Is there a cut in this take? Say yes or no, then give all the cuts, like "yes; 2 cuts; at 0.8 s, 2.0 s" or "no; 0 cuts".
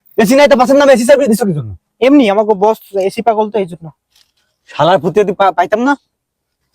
no; 0 cuts